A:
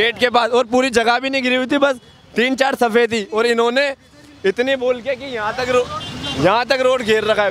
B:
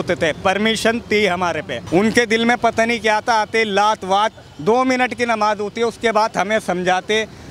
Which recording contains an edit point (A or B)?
B